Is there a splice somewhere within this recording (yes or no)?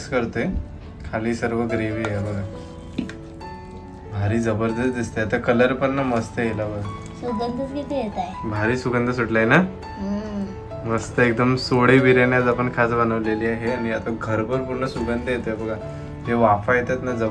no